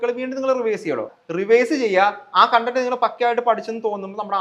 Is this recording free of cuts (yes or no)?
no